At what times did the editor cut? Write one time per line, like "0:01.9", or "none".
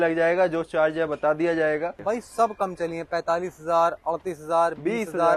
0:02.0